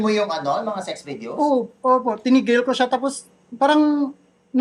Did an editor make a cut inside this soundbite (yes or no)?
no